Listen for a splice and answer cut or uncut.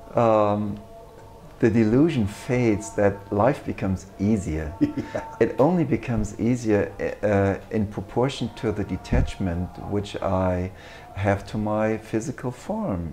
uncut